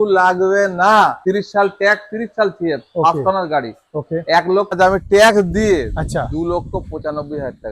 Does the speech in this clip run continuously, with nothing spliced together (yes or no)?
no